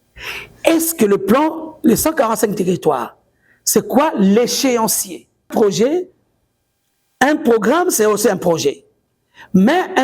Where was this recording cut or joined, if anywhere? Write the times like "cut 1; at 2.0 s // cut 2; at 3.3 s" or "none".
cut 1; at 5.5 s